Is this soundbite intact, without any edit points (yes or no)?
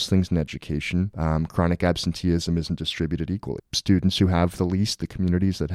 no